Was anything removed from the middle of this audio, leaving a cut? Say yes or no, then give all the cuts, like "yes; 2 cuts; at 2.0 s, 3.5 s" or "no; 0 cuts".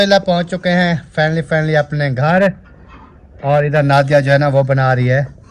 no; 0 cuts